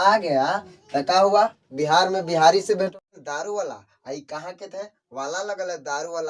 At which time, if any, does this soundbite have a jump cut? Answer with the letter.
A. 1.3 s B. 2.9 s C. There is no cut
B